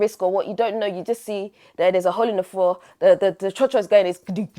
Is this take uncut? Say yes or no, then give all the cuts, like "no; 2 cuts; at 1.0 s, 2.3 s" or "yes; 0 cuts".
yes; 0 cuts